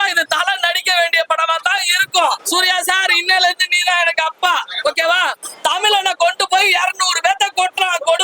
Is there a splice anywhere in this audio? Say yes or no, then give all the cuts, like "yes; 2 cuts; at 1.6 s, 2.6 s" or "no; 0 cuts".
yes; 2 cuts; at 2.4 s, 5.4 s